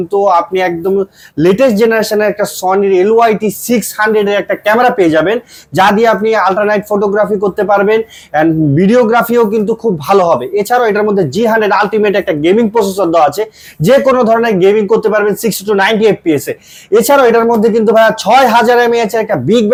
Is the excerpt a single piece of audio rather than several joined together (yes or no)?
yes